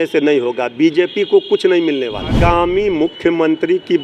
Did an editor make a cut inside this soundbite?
yes; 1 cut; at 2.3 s

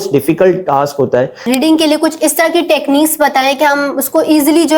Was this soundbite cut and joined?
yes; 1 cut; at 1.5 s

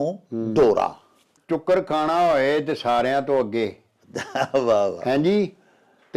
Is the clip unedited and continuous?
no; 1 cut; at 1.3 s

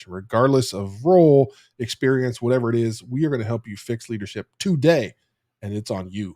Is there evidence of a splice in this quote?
no; 0 cuts

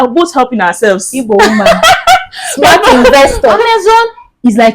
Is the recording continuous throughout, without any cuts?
no; 1 cut; at 3.6 s

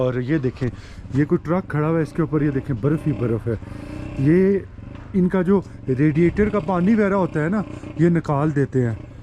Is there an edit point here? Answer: no; 0 cuts

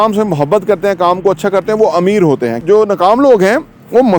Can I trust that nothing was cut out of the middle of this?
no; 1 cut; at 2.6 s

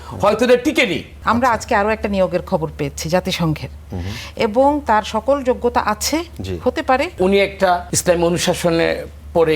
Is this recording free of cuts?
no; 2 cuts; at 1.1 s, 7.5 s

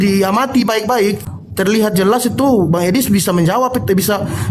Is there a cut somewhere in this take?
yes; 1 cut; at 1.2 s

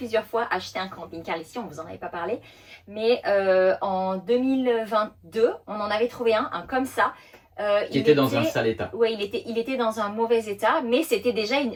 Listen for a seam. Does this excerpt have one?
no; 0 cuts

